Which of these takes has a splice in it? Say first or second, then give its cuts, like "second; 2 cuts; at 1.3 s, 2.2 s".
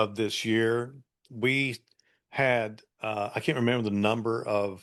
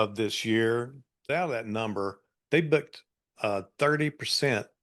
second; 1 cut; at 1.1 s